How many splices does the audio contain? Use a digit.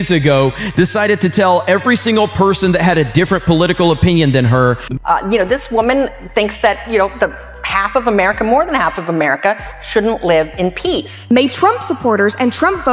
2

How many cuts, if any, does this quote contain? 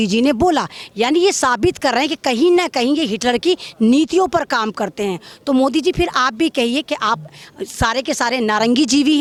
0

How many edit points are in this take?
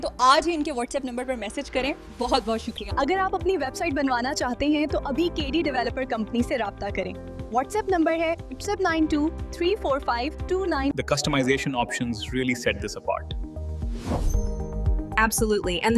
1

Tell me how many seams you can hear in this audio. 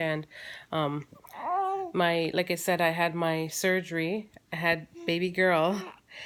0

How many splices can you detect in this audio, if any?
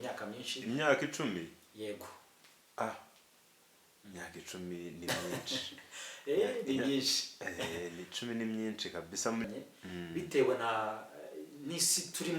1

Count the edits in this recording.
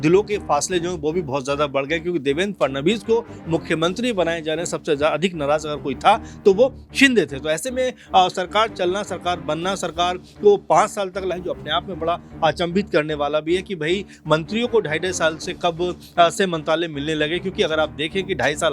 1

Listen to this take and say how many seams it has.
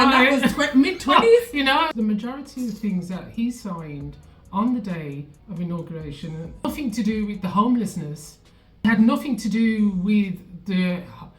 3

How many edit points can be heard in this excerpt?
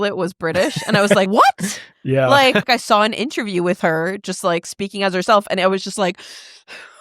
2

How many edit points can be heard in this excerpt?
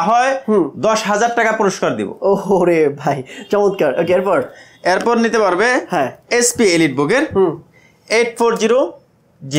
0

